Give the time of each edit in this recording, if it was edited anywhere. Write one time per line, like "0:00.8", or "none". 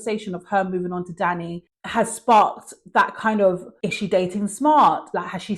none